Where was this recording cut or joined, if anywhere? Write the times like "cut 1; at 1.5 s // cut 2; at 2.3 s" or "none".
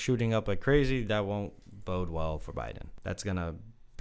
cut 1; at 2.9 s